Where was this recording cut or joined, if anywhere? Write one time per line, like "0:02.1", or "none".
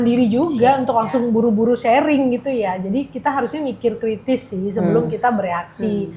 none